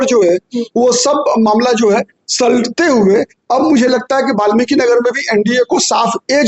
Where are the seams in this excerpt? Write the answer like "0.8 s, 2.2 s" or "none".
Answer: none